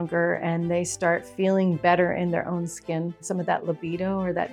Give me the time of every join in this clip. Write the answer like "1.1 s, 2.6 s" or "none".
3.2 s